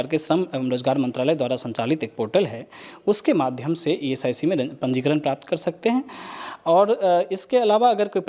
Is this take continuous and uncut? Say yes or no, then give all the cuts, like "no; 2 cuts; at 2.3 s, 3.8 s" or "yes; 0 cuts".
yes; 0 cuts